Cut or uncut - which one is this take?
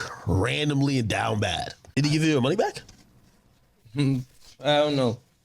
cut